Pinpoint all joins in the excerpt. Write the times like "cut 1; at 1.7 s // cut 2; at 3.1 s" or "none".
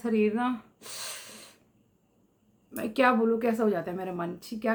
none